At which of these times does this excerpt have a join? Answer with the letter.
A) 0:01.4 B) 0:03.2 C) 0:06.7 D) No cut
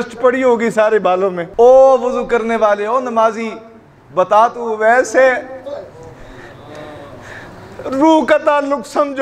A